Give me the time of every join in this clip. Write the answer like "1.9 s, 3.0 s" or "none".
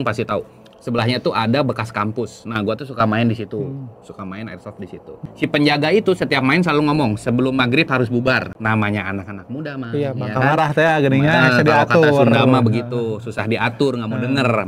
5.2 s, 8.5 s